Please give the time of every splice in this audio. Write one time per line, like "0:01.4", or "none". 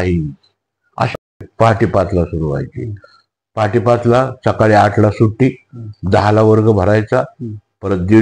0:01.3